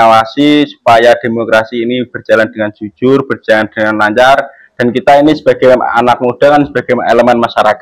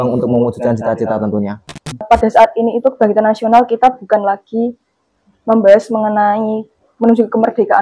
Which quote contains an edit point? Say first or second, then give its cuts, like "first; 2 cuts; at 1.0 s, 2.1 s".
second; 1 cut; at 2.0 s